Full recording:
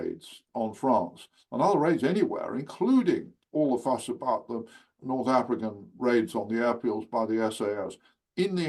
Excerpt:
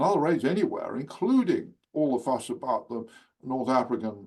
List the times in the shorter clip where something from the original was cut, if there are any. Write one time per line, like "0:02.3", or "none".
none